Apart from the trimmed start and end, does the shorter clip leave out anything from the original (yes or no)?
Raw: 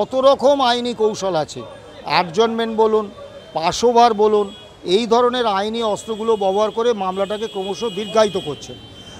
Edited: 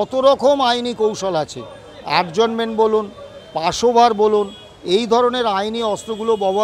no